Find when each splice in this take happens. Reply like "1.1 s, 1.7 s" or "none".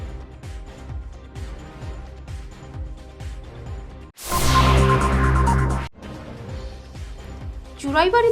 6.9 s